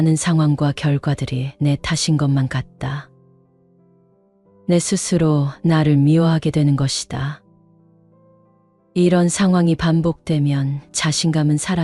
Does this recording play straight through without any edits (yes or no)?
no